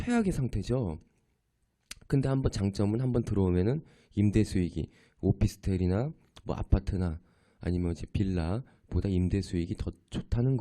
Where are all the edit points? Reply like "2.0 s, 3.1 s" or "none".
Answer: 5.4 s